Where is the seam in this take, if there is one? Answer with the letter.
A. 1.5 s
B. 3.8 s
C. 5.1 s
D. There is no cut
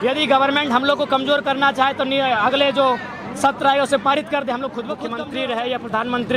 C